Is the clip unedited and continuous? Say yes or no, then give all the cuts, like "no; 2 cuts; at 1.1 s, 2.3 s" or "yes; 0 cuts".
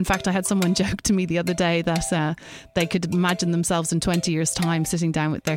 yes; 0 cuts